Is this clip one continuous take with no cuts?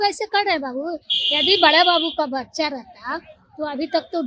yes; 0 cuts

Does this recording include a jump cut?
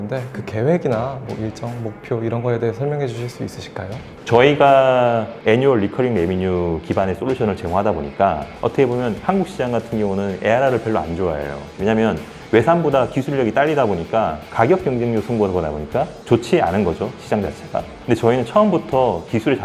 no; 0 cuts

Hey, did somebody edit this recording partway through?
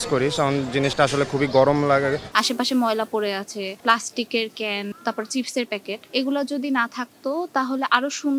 yes; 4 cuts; at 2.2 s, 3.8 s, 5.0 s, 6.0 s

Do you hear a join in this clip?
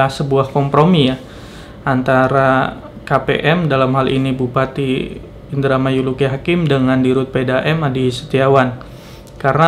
no; 0 cuts

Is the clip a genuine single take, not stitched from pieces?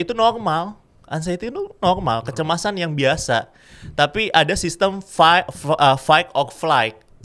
yes; 0 cuts

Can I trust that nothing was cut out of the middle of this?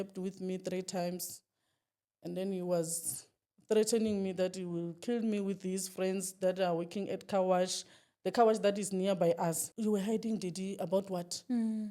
no; 1 cut; at 9.7 s

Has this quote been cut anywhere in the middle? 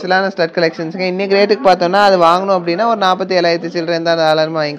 no; 0 cuts

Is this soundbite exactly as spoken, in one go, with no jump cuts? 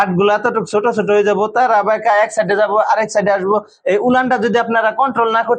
yes; 0 cuts

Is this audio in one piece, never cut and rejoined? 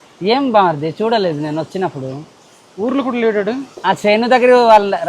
yes; 0 cuts

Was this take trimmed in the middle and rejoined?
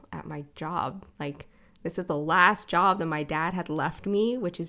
no; 0 cuts

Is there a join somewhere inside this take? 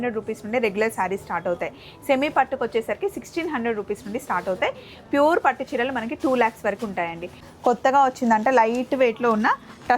yes; 1 cut; at 7.4 s

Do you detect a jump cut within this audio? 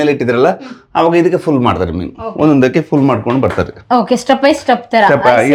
no; 0 cuts

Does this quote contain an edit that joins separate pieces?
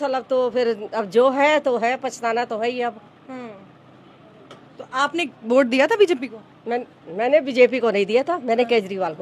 no; 0 cuts

